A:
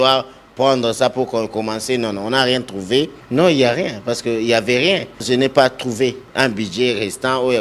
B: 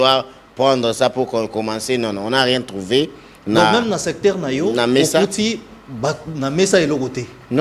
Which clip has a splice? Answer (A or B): A